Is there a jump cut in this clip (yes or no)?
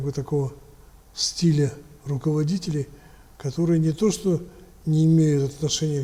no